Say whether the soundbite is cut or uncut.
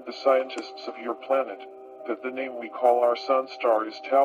uncut